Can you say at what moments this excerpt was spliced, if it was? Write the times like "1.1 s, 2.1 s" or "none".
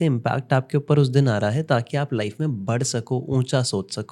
none